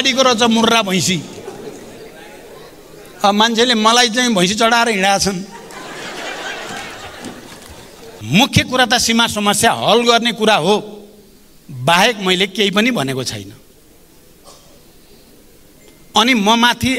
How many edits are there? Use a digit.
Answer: 1